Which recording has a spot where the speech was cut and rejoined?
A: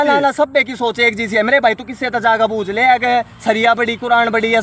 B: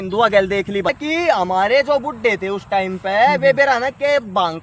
B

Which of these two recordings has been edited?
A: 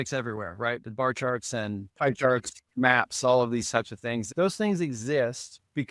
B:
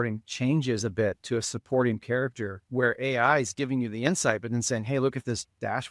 A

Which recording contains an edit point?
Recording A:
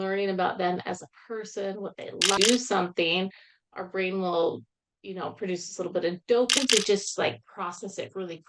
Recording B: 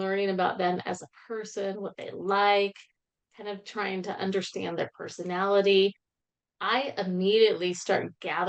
A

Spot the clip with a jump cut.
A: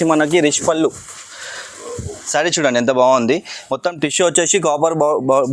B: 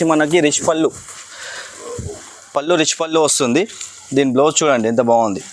A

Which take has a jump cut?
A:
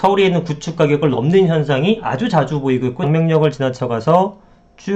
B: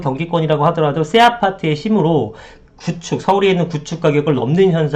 A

